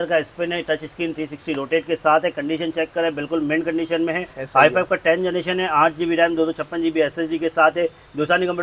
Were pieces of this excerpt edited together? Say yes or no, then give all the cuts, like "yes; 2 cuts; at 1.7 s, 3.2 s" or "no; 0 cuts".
no; 0 cuts